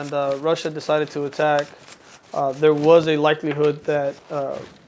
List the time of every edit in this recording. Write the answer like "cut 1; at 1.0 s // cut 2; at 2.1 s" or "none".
none